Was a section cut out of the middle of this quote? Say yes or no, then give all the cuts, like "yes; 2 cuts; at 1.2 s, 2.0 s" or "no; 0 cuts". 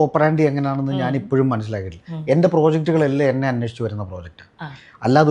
no; 0 cuts